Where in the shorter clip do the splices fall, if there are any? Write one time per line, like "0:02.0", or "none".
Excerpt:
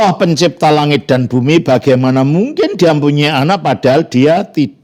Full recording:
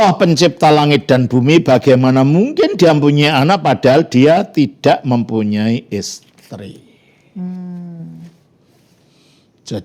none